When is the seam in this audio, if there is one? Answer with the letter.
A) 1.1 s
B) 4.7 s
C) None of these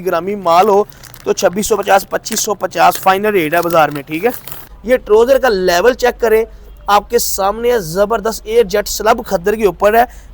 B